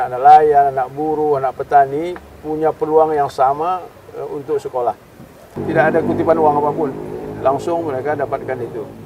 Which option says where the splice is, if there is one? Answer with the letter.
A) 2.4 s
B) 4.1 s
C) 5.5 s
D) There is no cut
C